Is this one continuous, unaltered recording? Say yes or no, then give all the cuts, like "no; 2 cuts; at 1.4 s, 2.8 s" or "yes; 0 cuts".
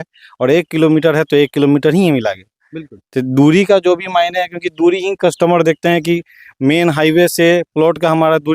yes; 0 cuts